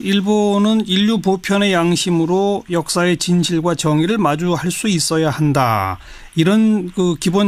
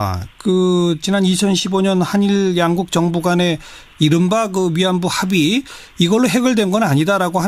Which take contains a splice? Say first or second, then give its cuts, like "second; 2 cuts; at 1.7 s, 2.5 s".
second; 1 cut; at 5.6 s